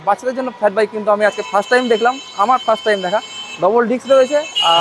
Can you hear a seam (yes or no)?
no